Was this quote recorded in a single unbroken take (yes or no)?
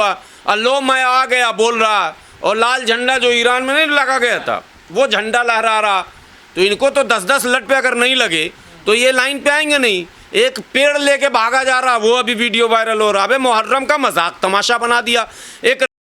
yes